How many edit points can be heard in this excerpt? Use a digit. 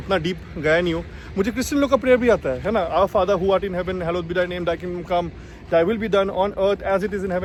0